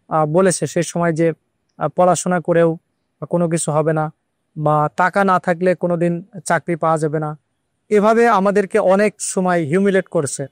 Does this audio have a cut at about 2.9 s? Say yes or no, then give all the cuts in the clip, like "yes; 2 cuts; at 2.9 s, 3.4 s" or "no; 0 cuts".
no; 0 cuts